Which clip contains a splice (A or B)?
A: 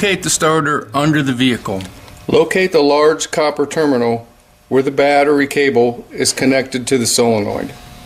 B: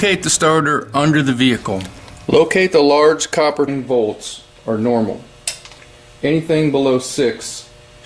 A